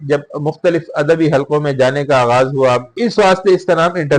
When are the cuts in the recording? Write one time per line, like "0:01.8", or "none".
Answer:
0:02.9